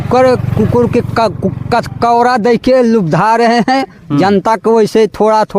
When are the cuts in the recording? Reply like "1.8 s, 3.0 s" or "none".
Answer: none